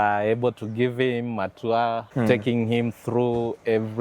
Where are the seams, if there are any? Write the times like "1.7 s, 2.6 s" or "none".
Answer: 2.1 s

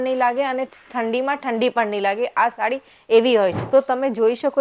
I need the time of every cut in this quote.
3.6 s

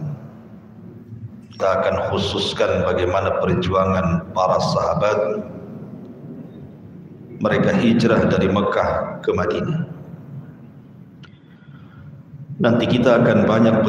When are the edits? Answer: 1.6 s

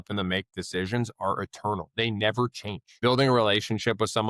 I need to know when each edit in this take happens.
3.0 s

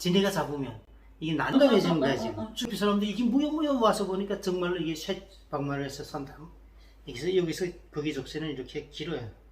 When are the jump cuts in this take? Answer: 1.4 s, 2.7 s

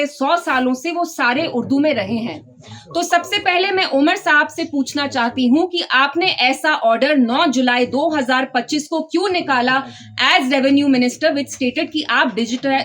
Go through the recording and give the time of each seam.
none

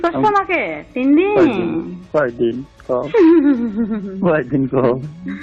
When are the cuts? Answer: none

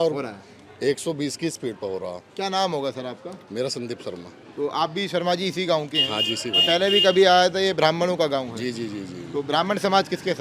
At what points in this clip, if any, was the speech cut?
none

